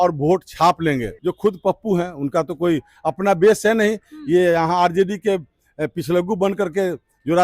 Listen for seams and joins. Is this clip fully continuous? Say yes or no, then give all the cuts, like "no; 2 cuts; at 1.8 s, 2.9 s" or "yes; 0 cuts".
no; 1 cut; at 1.1 s